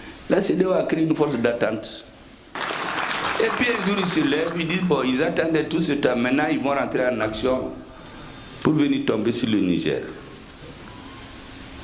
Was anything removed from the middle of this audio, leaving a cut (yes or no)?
yes